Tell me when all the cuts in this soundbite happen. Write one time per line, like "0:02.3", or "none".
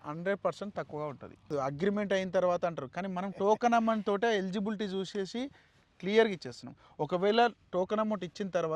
0:01.5